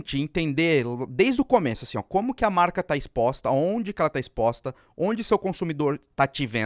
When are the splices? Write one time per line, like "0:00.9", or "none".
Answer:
none